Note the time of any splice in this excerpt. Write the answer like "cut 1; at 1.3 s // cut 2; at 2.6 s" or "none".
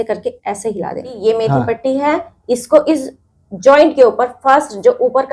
cut 1; at 1.1 s